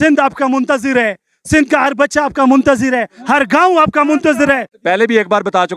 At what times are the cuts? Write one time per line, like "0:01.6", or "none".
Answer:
0:04.7